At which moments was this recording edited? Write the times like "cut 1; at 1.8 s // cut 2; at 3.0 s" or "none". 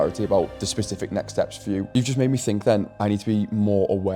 cut 1; at 1.9 s